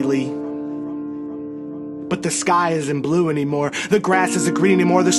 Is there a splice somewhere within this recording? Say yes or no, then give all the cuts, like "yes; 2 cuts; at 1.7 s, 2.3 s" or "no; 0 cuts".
no; 0 cuts